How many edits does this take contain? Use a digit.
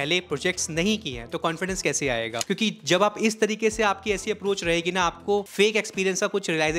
2